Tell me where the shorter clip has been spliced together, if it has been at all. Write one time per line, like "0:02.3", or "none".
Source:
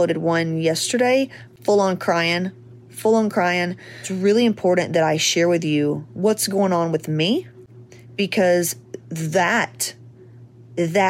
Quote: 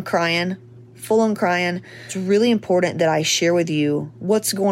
none